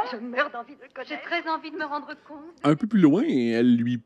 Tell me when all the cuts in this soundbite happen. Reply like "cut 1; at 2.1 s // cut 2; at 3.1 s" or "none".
none